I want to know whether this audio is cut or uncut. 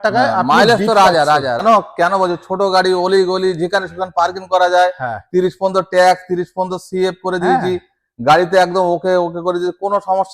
cut